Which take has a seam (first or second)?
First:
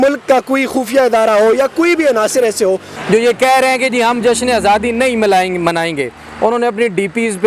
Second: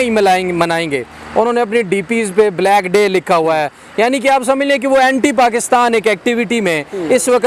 first